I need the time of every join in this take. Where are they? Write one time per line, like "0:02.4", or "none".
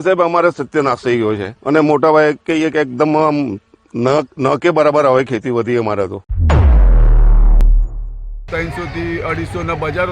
0:01.5
0:06.3
0:08.4